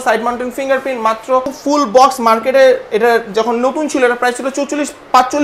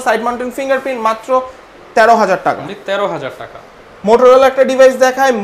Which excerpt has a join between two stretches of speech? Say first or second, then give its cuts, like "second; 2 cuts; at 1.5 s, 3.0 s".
first; 1 cut; at 1.6 s